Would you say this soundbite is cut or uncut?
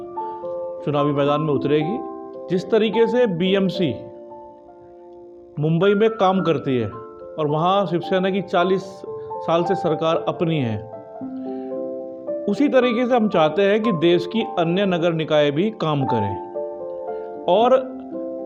uncut